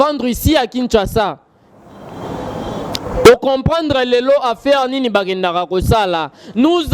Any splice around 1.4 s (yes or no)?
no